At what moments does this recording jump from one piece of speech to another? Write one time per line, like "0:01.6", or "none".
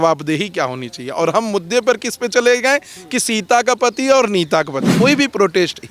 0:04.9